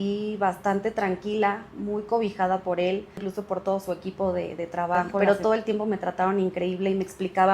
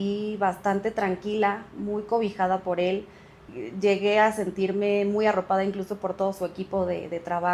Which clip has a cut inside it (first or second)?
first